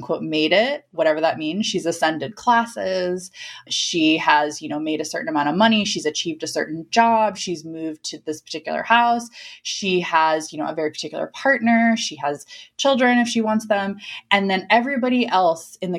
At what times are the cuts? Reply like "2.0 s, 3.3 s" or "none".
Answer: 0.9 s